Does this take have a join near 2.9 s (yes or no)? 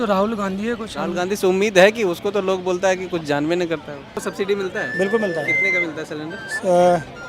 no